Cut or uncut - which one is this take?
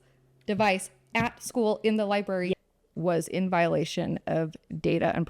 cut